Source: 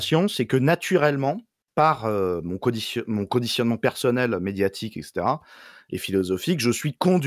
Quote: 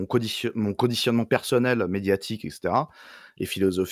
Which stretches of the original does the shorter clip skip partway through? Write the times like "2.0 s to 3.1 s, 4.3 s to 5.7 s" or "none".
none